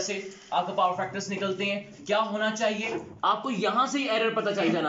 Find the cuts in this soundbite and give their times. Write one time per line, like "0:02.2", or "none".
0:03.1